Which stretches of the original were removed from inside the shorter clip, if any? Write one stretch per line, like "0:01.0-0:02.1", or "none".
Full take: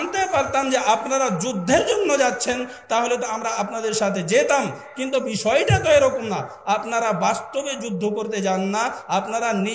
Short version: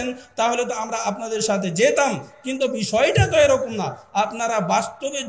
none

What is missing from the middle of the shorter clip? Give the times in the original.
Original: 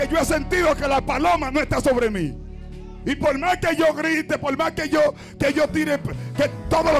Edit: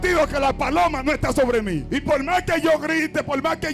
0:02.3-0:03.0

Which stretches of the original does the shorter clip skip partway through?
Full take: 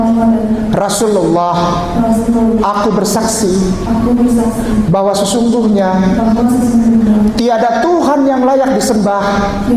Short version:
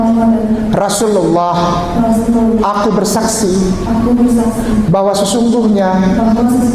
none

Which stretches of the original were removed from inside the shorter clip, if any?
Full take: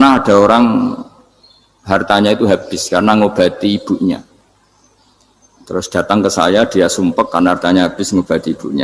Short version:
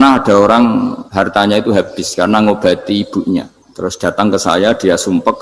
0:01.0-0:01.8
0:04.4-0:05.5

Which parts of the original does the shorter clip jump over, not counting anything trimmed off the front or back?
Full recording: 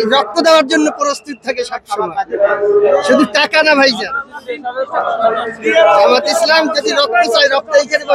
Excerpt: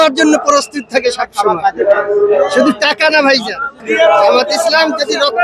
0:04.3-0:05.5

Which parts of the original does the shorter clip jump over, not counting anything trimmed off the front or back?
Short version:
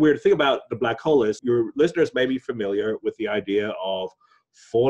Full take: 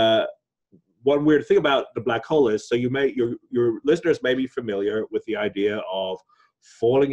0:02.6-0:03.5

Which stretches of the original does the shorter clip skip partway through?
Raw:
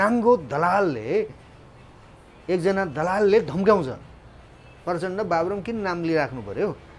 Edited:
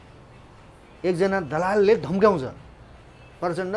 none

